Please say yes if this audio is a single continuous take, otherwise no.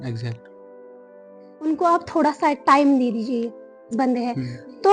no